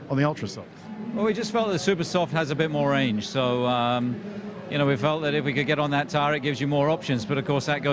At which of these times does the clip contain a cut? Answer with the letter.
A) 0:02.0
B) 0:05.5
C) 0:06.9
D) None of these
B